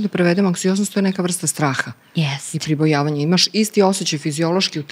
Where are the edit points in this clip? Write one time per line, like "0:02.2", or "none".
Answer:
none